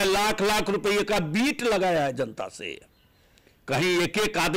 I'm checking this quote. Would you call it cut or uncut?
uncut